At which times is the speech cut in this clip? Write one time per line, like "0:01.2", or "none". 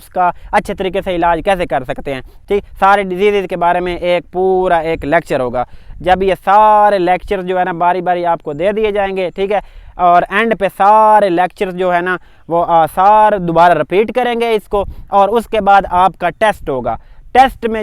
none